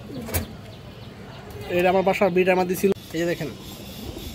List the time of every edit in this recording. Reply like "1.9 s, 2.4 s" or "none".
2.9 s

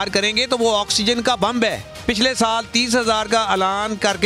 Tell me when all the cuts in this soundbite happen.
1.9 s

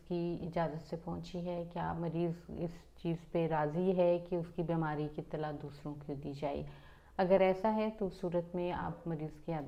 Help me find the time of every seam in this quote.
none

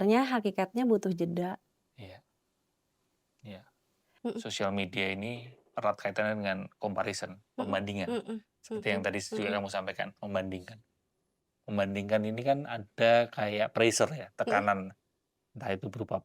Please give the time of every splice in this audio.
4.1 s

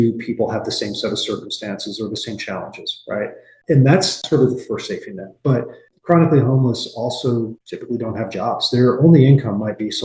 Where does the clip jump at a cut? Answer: none

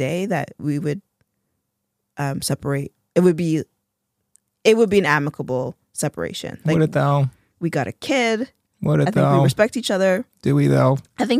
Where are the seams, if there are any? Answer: none

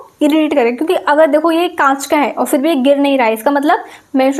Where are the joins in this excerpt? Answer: none

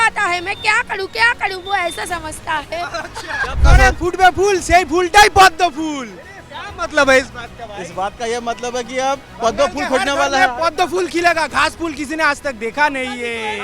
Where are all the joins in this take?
3.6 s

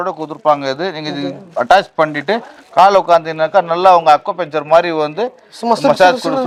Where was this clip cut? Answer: none

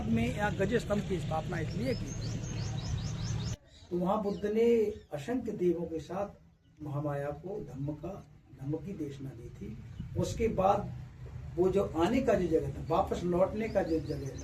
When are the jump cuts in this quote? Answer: 3.5 s

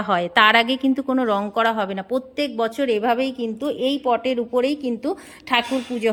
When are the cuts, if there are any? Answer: none

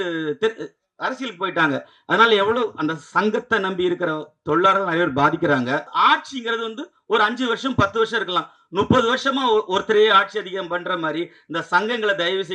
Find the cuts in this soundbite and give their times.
5.9 s

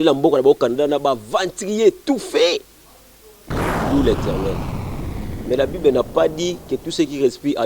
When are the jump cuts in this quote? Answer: 3.3 s

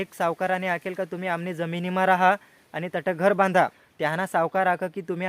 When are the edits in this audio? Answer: 3.8 s

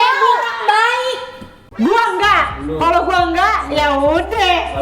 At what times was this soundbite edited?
1.6 s

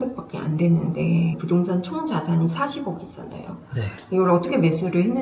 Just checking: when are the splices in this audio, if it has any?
1.4 s

